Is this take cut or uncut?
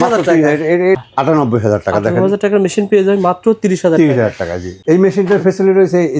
cut